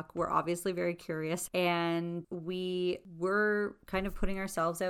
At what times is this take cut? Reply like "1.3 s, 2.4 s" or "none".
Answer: 1.4 s, 2.3 s, 3.1 s